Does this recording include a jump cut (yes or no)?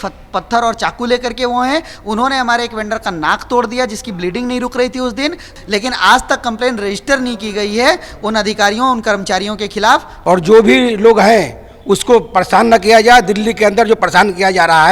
yes